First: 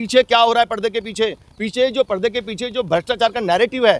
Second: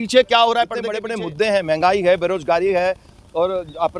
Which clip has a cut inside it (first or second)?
second